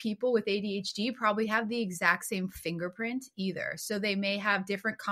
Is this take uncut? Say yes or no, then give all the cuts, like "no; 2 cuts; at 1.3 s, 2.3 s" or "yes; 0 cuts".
yes; 0 cuts